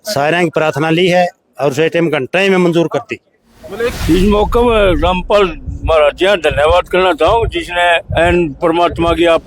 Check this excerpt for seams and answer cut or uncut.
cut